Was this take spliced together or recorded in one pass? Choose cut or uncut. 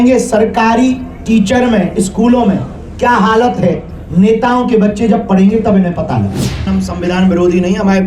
cut